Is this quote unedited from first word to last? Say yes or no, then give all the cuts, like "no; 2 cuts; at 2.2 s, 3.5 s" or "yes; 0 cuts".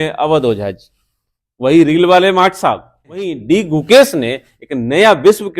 no; 1 cut; at 3.3 s